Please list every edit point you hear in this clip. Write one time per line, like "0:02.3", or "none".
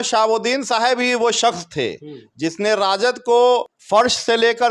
0:03.8